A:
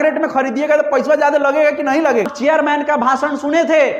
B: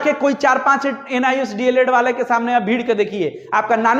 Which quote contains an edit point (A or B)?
A